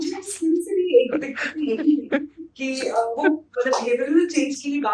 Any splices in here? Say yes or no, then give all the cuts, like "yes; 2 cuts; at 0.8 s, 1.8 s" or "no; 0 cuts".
no; 0 cuts